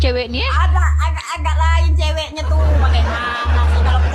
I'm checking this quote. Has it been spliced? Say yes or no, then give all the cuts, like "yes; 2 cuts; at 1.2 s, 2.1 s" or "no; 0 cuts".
no; 0 cuts